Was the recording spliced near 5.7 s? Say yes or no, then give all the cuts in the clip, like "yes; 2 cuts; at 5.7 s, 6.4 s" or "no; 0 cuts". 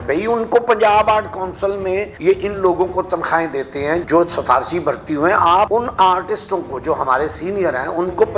yes; 3 cuts; at 2.1 s, 4.0 s, 5.7 s